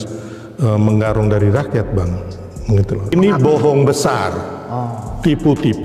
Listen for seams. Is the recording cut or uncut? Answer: cut